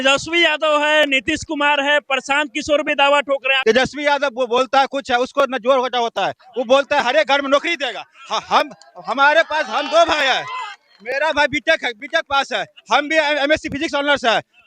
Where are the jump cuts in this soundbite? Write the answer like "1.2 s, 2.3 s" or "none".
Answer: 3.5 s